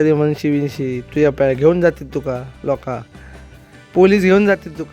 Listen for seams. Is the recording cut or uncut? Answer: uncut